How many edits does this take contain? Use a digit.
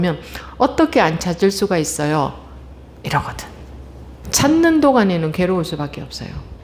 1